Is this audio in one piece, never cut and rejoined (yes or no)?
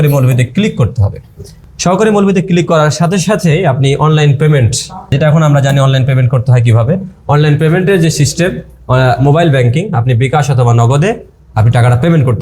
yes